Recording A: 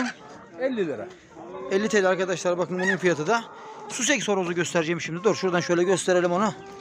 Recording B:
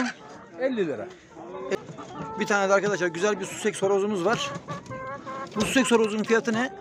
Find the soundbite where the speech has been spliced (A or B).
B